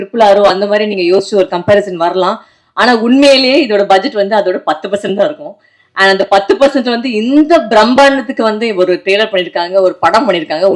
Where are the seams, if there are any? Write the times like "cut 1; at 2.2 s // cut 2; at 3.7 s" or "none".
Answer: none